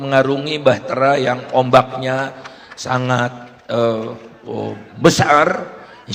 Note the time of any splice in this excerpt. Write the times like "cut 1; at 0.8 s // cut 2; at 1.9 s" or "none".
none